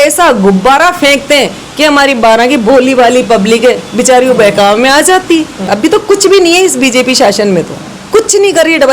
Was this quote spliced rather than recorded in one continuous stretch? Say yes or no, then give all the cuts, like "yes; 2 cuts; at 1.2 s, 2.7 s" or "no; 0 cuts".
yes; 1 cut; at 5.7 s